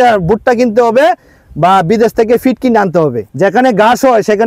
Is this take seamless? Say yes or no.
no